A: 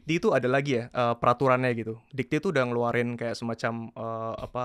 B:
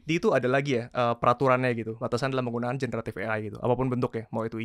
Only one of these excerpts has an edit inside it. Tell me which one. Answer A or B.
B